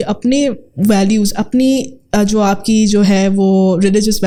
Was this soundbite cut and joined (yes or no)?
no